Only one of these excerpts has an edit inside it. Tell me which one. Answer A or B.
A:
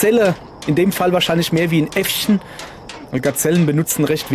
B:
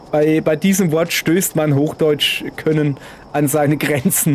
A